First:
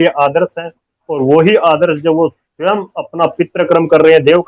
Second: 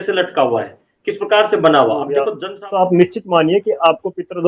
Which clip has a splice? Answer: second; 1 cut; at 2.4 s

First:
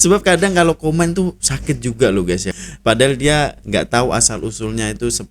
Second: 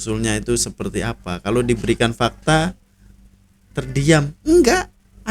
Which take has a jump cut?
first; 1 cut; at 2.5 s

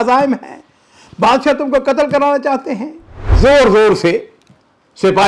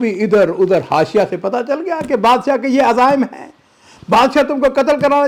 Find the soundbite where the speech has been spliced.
first; 1 cut; at 3.3 s

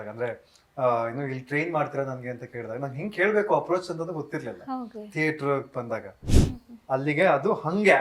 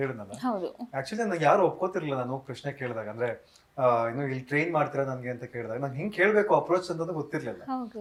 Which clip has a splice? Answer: first; 1 cut; at 6.2 s

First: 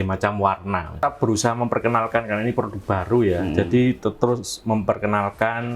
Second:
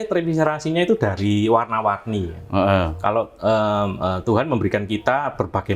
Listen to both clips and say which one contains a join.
first; 1 cut; at 1.0 s

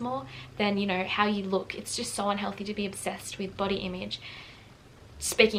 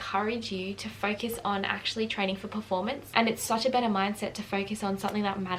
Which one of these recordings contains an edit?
second; 1 cut; at 3.1 s

